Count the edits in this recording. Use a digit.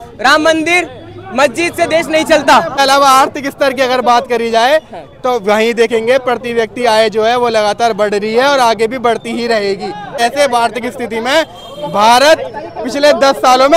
2